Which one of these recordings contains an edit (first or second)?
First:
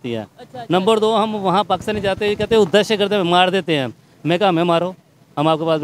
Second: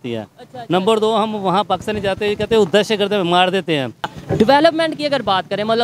second